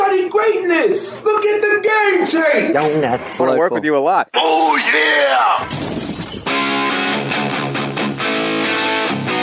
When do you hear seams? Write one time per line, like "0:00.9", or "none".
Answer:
0:05.4